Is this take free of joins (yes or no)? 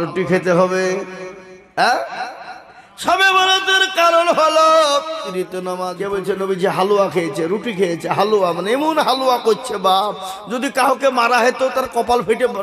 no